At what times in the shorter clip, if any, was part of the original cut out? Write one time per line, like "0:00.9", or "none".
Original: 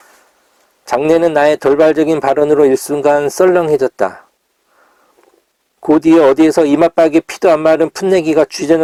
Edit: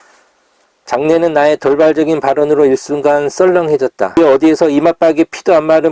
0:04.2